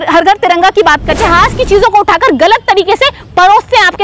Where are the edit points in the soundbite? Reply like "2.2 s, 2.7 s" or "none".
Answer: 1.1 s